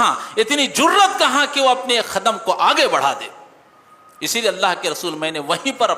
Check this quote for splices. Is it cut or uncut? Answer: uncut